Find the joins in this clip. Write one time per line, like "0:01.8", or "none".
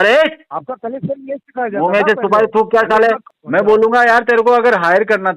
0:03.3